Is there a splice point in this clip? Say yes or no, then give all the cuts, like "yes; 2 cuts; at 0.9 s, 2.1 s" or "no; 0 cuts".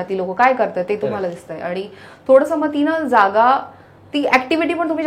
no; 0 cuts